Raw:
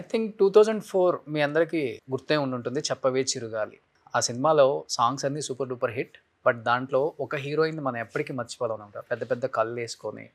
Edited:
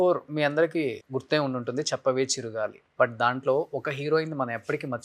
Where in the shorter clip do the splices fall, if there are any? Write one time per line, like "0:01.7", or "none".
0:02.8